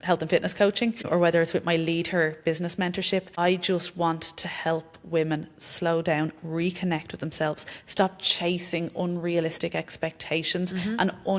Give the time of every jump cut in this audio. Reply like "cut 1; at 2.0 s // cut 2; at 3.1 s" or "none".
cut 1; at 1.0 s // cut 2; at 3.3 s